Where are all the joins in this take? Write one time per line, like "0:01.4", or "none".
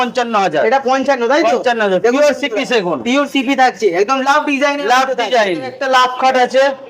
0:05.8